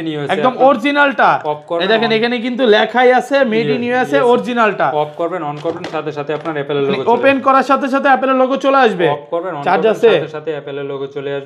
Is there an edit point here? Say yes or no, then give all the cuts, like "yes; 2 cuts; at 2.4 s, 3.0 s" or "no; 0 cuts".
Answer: no; 0 cuts